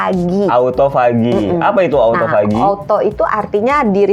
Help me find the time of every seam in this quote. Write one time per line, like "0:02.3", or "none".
none